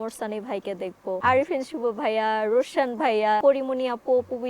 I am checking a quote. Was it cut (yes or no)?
yes